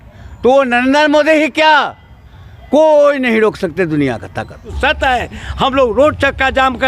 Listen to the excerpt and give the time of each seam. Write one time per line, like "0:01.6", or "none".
0:04.7